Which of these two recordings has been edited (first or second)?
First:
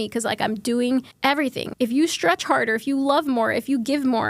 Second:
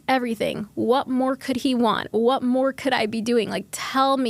first